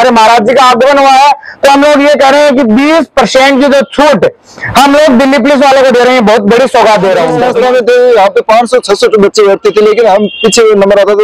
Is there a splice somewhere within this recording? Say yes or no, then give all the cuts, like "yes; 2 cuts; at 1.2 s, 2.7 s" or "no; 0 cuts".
yes; 1 cut; at 7.4 s